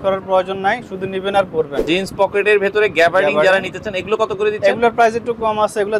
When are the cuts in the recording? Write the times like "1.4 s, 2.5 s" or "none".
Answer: 1.8 s